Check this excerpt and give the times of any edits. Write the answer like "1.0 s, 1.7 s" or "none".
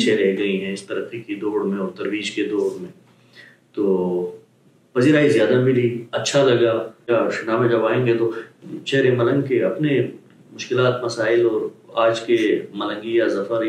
7.1 s